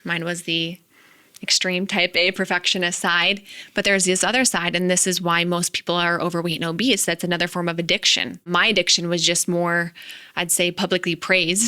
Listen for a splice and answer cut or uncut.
cut